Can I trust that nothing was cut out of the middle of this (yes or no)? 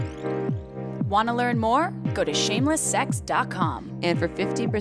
no